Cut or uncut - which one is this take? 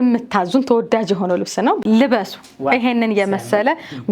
cut